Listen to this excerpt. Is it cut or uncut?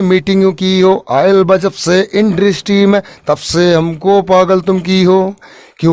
uncut